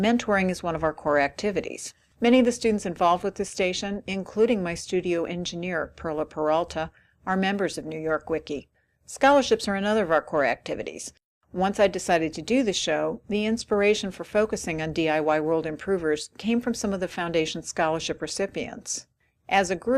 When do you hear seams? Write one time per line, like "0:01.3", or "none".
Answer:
0:17.2